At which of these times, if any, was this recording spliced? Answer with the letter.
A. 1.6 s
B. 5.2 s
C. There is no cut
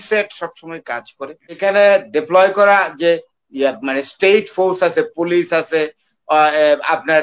A